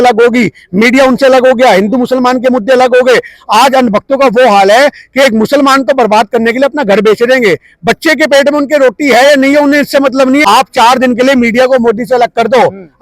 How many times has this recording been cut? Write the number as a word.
one